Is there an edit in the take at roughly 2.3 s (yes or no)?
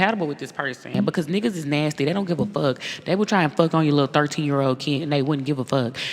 no